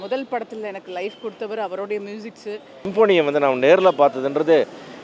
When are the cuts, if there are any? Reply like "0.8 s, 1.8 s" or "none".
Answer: 2.9 s